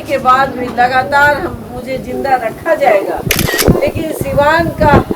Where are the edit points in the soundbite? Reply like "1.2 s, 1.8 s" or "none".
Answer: 3.4 s